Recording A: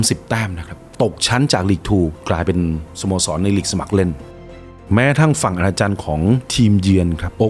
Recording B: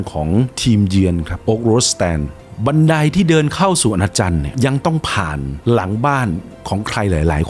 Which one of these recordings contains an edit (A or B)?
A